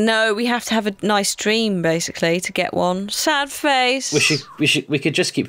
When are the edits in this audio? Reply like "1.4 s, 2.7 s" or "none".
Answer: none